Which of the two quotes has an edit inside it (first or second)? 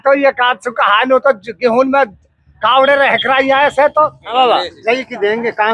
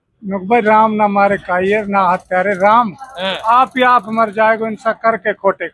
first